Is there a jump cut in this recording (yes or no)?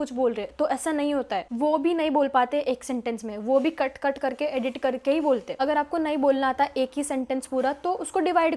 no